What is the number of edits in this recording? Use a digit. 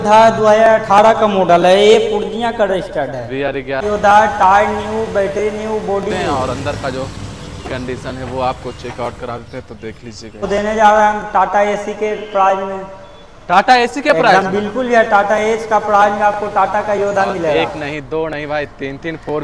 4